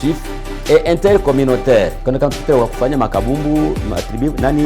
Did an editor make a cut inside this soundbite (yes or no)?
yes